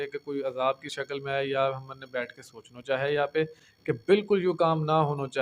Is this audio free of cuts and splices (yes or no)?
yes